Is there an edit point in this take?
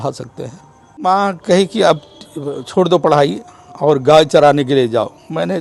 yes; 1 cut; at 1.0 s

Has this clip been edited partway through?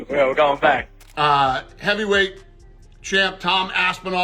yes; 1 cut; at 1.0 s

